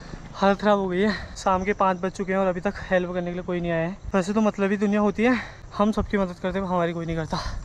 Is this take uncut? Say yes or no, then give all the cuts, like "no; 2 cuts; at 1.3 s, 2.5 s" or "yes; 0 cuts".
no; 3 cuts; at 1.3 s, 4.0 s, 5.6 s